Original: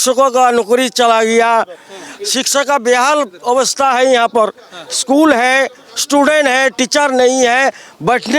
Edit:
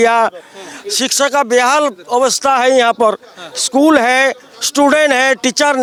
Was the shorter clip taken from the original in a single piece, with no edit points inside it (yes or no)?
yes